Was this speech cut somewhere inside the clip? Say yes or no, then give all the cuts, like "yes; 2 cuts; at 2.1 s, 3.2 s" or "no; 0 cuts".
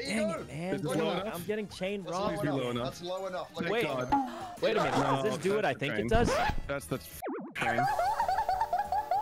no; 0 cuts